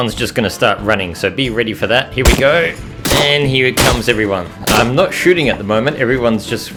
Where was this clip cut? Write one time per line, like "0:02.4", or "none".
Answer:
none